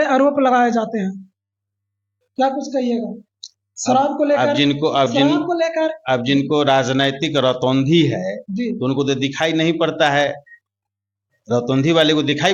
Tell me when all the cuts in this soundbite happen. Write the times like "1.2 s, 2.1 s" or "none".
none

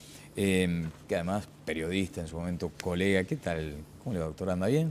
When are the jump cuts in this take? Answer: none

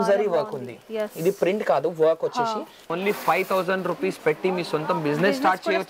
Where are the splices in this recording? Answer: 2.8 s

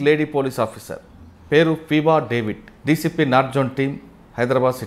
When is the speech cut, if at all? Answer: 2.7 s

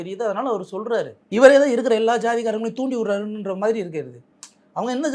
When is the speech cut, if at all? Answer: 1.2 s

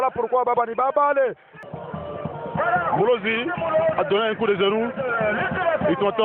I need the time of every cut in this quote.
1.6 s

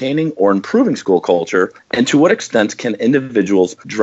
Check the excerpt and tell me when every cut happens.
1.8 s

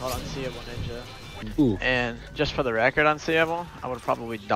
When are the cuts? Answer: 1.3 s

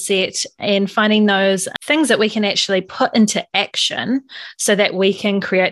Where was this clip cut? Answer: 1.7 s

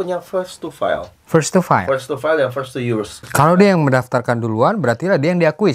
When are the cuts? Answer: 3.2 s

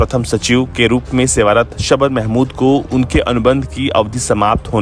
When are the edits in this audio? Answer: none

